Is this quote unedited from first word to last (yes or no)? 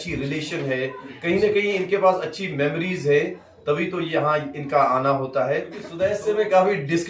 no